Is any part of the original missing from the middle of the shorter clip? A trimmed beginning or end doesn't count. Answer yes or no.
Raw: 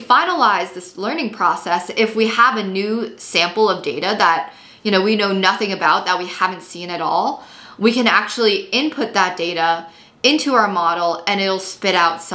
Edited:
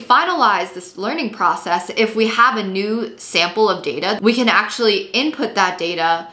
yes